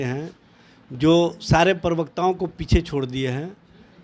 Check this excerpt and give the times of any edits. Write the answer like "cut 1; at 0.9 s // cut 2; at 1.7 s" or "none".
none